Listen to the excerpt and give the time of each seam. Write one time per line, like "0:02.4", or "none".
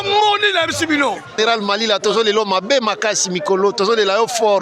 0:01.4